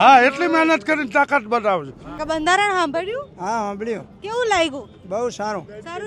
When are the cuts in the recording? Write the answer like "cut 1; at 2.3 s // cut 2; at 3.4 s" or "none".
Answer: cut 1; at 2.1 s